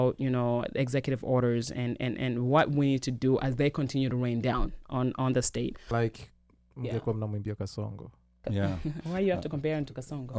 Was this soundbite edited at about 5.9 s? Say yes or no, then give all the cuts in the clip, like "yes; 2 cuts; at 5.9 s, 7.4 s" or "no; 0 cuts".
yes; 1 cut; at 5.9 s